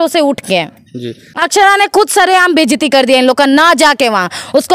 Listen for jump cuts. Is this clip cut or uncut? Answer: cut